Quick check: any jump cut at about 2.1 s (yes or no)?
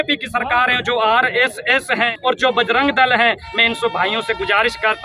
yes